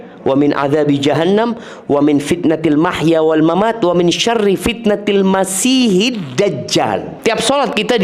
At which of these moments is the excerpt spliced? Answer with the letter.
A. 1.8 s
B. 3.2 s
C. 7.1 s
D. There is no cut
C